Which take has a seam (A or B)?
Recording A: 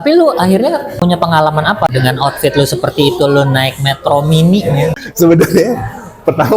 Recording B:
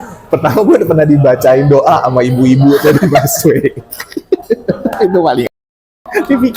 A